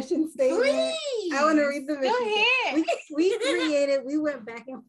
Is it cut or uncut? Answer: uncut